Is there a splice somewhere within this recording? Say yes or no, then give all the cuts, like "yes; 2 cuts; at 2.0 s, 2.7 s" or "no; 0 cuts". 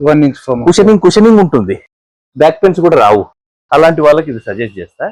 no; 0 cuts